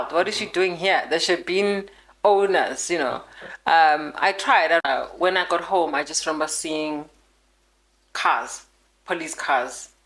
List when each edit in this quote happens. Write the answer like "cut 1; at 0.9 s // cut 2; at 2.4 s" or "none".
cut 1; at 4.8 s